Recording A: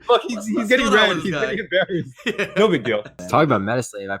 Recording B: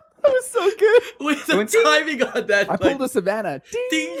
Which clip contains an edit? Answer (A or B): A